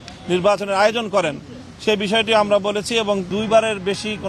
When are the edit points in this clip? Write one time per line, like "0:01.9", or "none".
0:03.3